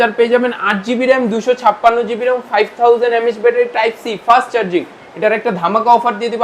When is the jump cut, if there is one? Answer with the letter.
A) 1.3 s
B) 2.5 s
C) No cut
C